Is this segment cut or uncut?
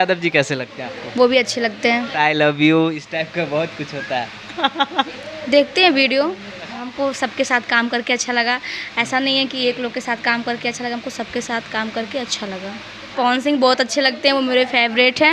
cut